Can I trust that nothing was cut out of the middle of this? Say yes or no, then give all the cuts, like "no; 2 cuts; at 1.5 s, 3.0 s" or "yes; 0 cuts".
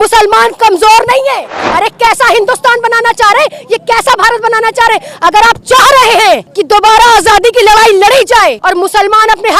no; 3 cuts; at 1.7 s, 6.5 s, 8.6 s